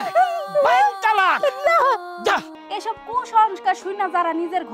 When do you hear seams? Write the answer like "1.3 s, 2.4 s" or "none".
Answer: 2.6 s